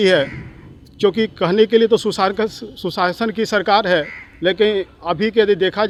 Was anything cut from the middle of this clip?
no; 0 cuts

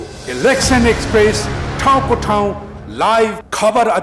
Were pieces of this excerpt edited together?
no; 0 cuts

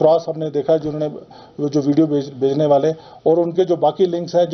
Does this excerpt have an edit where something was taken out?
no; 0 cuts

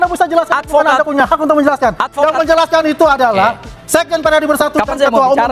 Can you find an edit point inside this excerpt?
no; 0 cuts

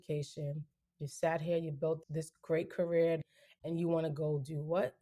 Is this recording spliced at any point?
yes; 2 cuts; at 2.1 s, 3.2 s

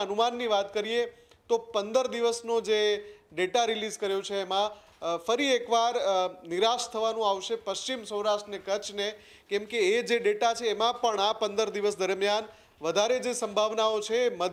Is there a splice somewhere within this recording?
no; 0 cuts

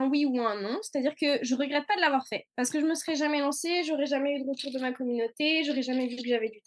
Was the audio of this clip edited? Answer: no; 0 cuts

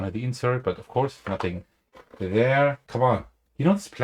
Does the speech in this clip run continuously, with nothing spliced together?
no; 1 cut; at 2.8 s

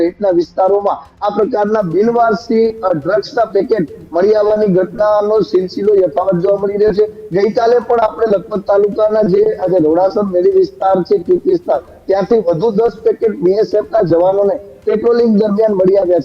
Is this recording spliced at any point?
no; 0 cuts

